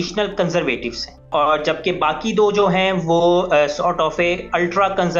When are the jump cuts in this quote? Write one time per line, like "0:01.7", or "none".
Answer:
0:01.3

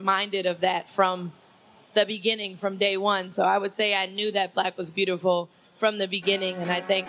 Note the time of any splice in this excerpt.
none

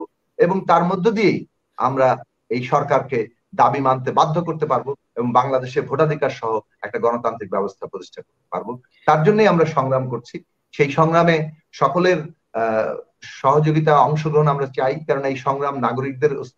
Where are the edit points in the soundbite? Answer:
none

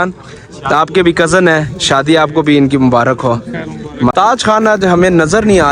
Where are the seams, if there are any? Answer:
0:04.1

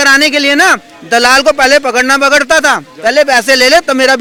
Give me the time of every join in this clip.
none

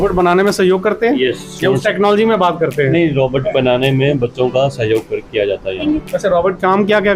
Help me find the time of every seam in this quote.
0:05.8

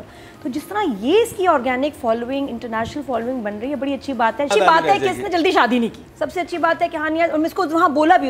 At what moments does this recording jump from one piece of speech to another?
0:04.5

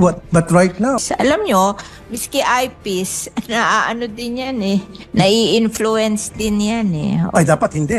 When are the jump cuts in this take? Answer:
0:01.0

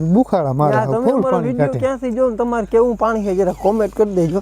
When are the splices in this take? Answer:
none

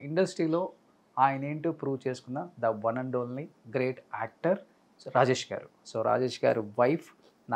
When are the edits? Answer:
0:05.9

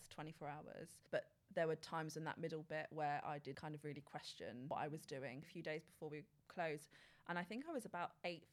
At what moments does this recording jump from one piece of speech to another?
0:00.9
0:03.6
0:05.5

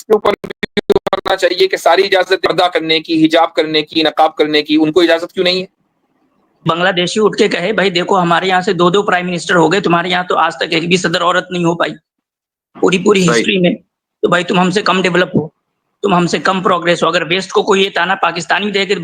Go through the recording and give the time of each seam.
0:02.5
0:06.6

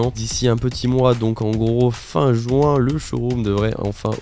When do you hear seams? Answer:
none

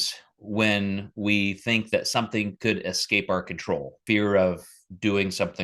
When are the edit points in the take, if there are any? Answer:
0:04.0

